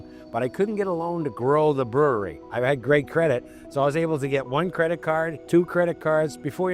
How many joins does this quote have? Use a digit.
2